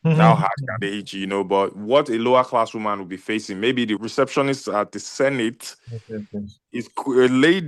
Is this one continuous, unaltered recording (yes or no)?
no